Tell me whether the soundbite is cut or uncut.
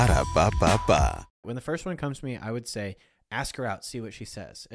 cut